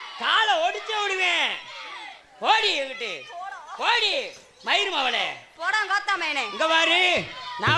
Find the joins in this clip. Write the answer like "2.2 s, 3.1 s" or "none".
none